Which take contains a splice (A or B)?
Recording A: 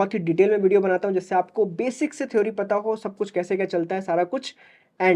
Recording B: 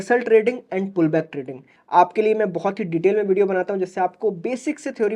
B